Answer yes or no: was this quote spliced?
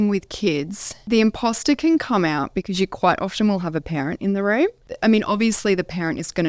yes